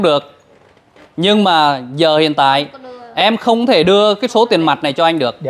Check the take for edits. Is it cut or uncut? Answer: uncut